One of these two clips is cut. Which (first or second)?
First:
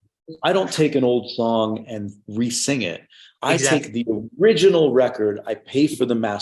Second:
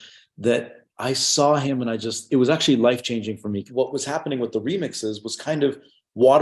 second